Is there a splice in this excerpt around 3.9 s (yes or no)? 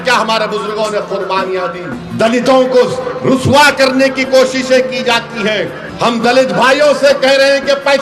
no